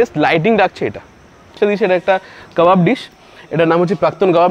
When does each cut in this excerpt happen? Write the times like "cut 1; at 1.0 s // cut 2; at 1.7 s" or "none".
cut 1; at 1.6 s